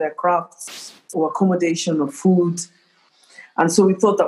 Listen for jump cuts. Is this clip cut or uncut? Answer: cut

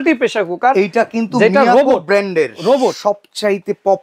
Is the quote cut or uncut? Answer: uncut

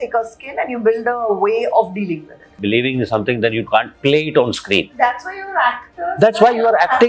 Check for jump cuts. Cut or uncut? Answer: cut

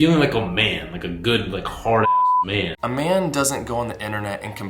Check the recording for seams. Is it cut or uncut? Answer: cut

